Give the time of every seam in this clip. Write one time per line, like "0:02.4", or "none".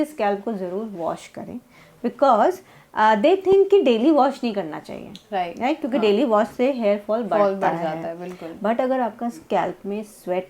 none